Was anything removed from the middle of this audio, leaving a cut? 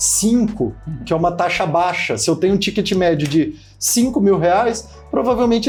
no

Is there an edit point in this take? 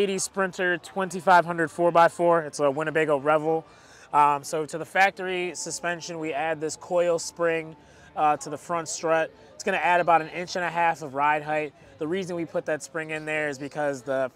no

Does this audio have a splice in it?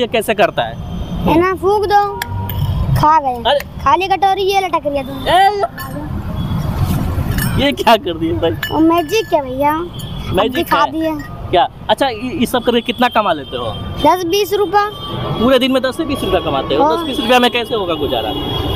no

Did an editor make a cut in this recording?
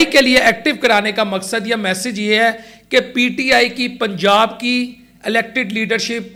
no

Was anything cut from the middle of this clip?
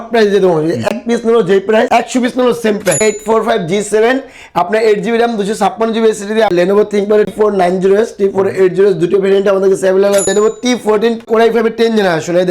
yes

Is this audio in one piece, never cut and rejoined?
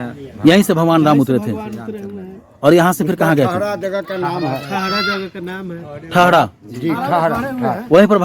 yes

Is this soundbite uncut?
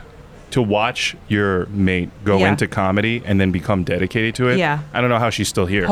yes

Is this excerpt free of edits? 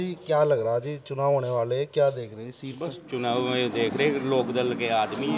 yes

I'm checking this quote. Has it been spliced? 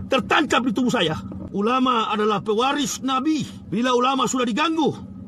yes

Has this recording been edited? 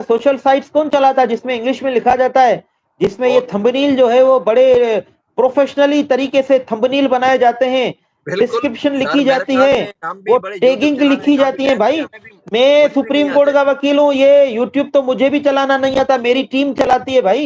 no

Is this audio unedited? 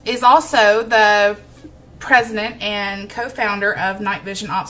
no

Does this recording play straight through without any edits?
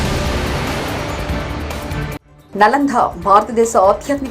no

